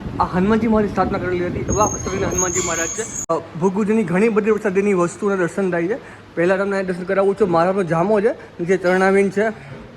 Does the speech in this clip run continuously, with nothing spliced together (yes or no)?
no